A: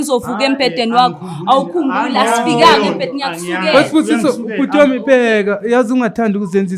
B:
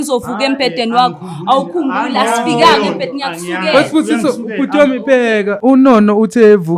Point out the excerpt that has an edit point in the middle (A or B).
B